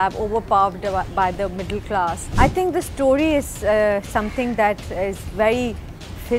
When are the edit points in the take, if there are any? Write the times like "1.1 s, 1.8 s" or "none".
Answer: 2.2 s